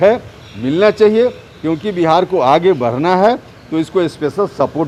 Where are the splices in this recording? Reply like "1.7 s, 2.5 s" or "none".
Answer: none